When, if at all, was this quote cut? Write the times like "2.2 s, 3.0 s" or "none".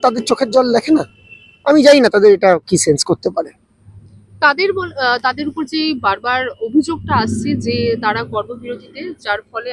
none